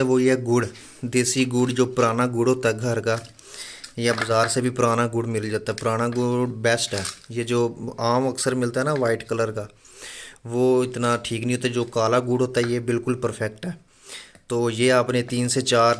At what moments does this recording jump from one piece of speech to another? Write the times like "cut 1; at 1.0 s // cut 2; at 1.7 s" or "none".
none

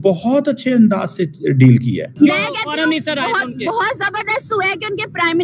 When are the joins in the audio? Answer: cut 1; at 2.1 s

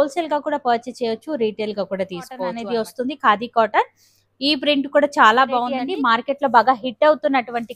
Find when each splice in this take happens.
cut 1; at 2.6 s // cut 2; at 5.7 s

